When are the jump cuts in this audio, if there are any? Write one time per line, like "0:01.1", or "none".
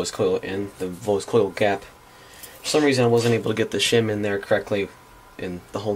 0:01.2